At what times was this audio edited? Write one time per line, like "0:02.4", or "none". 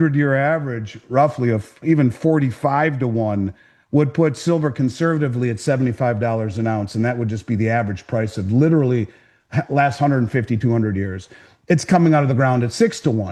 none